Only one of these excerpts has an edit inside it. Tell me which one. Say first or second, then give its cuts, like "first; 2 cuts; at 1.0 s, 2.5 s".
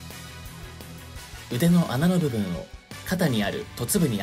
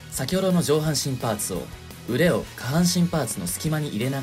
first; 1 cut; at 1.4 s